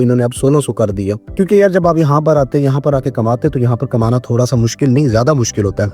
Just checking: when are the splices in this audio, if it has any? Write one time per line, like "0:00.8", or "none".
0:01.2